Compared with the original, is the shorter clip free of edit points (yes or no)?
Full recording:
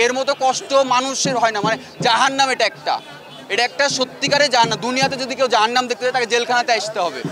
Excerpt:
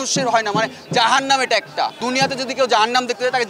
no